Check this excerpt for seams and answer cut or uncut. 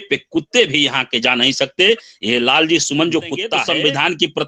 cut